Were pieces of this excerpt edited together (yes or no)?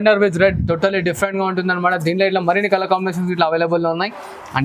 no